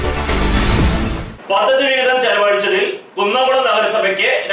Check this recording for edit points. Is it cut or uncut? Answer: uncut